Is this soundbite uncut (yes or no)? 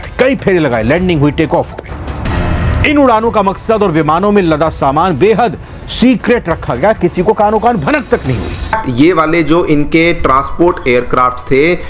no